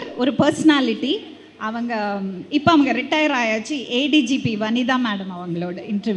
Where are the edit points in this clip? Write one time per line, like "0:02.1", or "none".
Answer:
none